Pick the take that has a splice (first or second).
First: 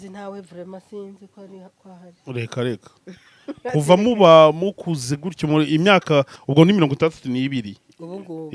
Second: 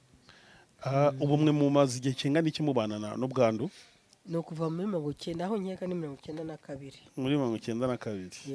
first